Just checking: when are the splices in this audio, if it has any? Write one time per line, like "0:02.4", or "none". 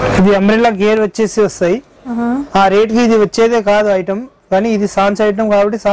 none

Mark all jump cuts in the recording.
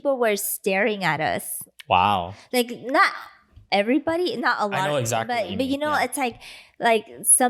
none

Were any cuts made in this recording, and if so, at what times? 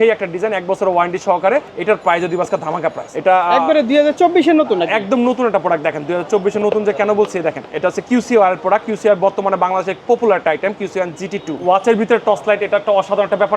0:01.7
0:03.1
0:07.7
0:11.6

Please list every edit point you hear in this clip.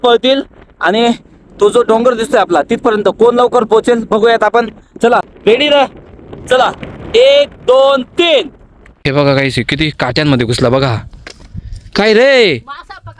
0:05.2
0:09.1

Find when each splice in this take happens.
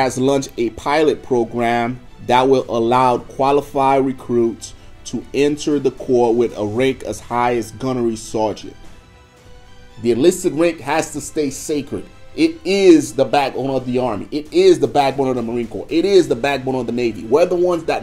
0:09.1

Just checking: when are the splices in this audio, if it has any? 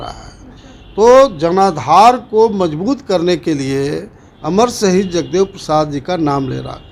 none

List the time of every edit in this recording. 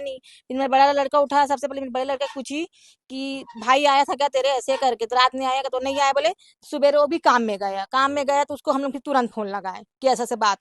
none

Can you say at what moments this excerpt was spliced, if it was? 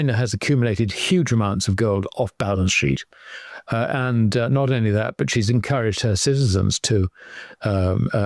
none

